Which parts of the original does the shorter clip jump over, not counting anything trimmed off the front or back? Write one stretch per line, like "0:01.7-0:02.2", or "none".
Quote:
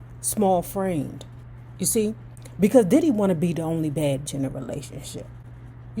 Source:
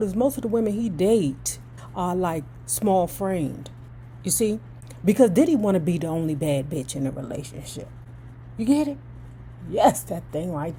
0:06.7-0:06.9

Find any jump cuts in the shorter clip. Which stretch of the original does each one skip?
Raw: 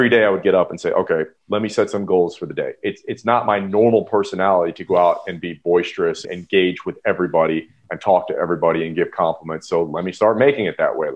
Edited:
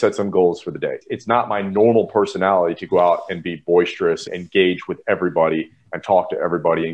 0:02.8-0:03.0

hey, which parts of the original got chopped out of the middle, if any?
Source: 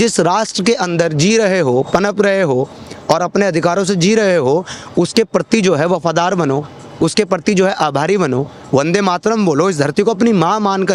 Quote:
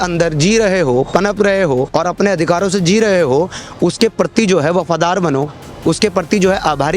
0:02.7-0:03.0

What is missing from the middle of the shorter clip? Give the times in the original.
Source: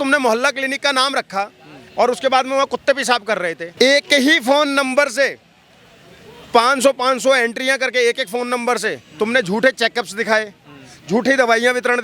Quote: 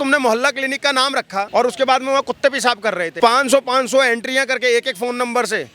0:01.5-0:01.9
0:03.5-0:06.4

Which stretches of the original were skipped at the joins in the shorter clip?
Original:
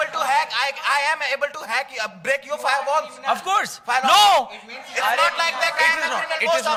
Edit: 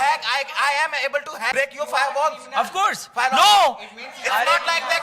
0:01.8-0:02.2

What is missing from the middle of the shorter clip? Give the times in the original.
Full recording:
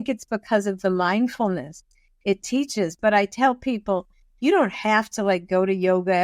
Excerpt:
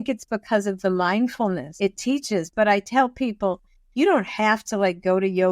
0:01.7-0:02.1

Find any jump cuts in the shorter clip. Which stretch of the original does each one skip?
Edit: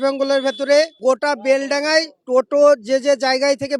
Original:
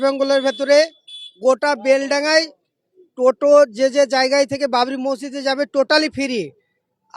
0:00.9-0:01.3
0:02.6-0:03.1

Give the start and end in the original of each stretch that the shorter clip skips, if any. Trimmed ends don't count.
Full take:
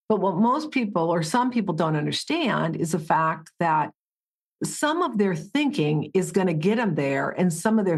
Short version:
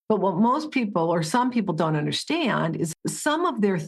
0:02.9-0:04.5

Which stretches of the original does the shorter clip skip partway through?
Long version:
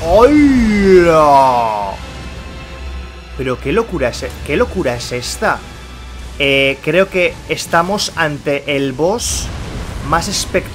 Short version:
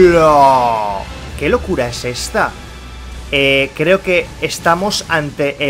0:02.2-0:04.3

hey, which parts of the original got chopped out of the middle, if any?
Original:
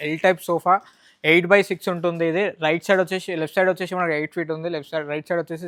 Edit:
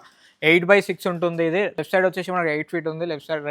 0:02.6-0:03.4

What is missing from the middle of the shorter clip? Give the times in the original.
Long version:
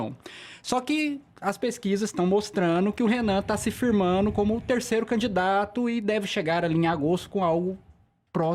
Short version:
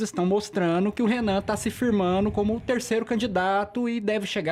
none

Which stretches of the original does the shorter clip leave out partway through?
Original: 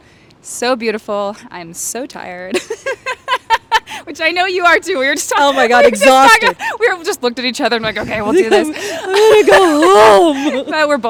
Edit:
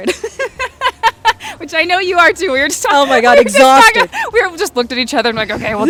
none

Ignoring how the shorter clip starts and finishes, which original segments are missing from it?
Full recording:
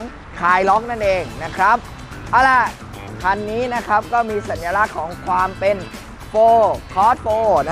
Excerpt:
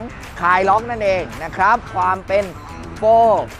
0:01.9-0:05.2

